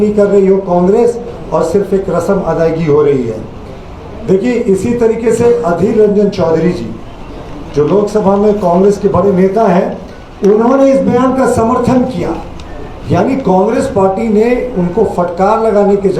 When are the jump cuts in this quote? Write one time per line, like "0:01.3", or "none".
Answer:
none